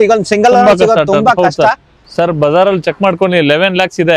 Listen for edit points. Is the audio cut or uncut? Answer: cut